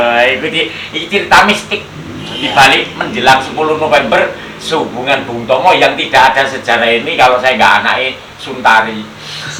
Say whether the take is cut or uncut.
uncut